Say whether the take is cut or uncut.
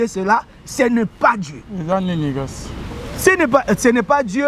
cut